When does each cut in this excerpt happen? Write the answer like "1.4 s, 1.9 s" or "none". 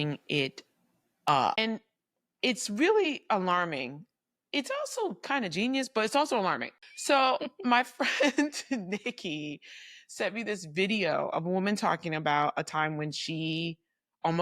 1.6 s, 6.7 s